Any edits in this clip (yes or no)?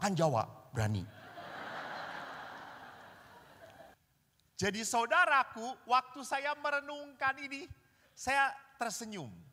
yes